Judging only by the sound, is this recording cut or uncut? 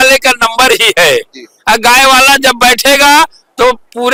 uncut